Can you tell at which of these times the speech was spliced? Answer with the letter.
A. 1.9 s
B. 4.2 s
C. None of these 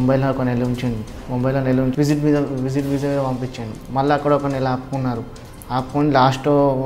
A